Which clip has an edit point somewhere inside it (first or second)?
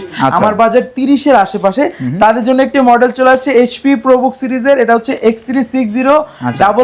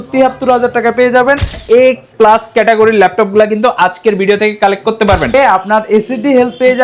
second